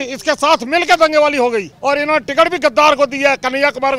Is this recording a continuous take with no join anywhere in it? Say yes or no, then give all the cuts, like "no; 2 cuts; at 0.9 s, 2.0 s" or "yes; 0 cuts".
no; 1 cut; at 1.7 s